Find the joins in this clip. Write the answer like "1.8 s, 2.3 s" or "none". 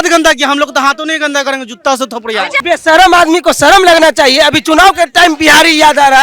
2.6 s